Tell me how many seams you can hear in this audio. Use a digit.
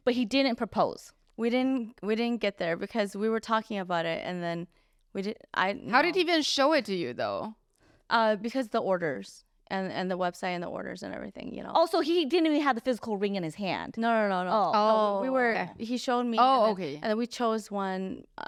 0